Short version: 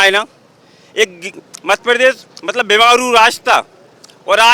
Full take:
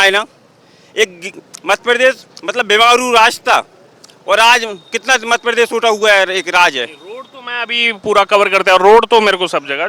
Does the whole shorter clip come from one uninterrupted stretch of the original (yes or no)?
yes